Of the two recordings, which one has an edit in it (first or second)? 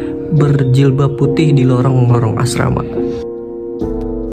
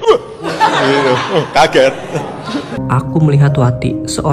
second